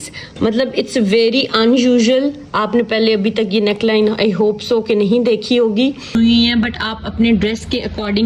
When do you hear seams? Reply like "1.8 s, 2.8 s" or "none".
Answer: 6.1 s